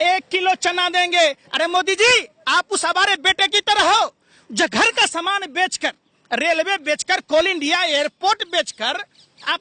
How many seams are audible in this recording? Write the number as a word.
zero